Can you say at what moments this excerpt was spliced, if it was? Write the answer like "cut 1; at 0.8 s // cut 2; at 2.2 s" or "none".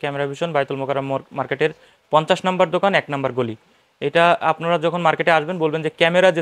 none

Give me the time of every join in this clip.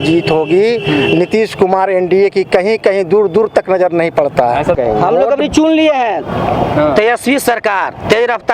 cut 1; at 4.8 s

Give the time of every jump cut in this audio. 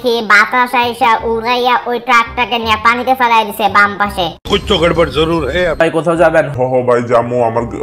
cut 1; at 5.8 s

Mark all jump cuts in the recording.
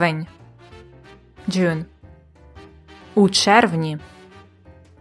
cut 1; at 4.0 s

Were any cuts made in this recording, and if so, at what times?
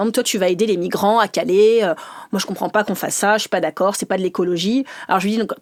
none

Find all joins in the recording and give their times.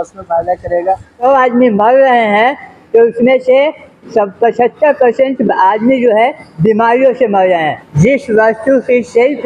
cut 1; at 1.2 s // cut 2; at 7.8 s

